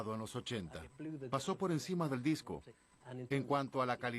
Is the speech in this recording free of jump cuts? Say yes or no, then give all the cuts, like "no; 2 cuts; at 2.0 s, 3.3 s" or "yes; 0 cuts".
no; 1 cut; at 2.9 s